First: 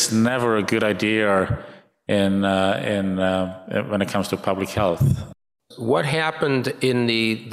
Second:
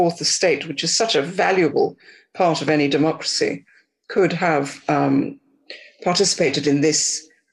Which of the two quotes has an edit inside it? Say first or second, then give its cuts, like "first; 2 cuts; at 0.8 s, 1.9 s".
first; 1 cut; at 5.2 s